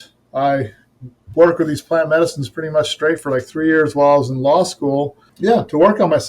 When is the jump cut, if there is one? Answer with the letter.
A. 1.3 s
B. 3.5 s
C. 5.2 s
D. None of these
C